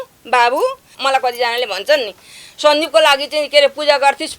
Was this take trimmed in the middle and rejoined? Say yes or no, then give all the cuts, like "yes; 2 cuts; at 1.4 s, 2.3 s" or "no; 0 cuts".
yes; 1 cut; at 0.9 s